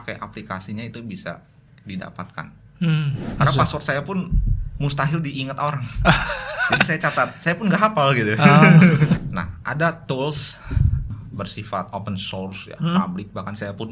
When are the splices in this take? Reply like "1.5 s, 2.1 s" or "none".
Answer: 3.2 s, 9.2 s, 11.1 s